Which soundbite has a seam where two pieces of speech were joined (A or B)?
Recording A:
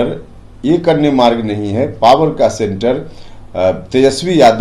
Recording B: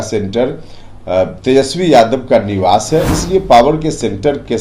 B